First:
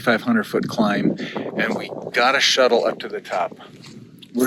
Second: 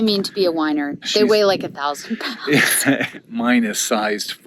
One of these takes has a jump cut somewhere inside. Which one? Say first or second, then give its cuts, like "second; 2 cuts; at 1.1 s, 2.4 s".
second; 2 cuts; at 1.0 s, 3.1 s